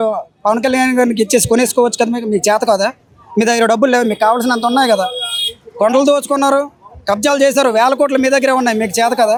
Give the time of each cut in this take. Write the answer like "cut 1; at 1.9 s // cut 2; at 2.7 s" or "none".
none